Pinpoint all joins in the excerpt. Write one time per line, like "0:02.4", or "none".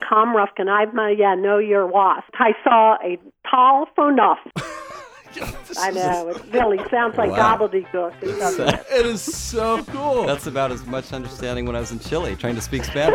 0:02.3
0:04.5